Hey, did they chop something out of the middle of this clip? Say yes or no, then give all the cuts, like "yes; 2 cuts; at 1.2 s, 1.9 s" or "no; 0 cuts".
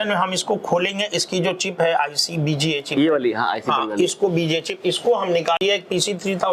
yes; 1 cut; at 5.6 s